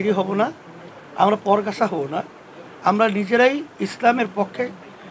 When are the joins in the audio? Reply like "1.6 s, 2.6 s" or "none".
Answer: none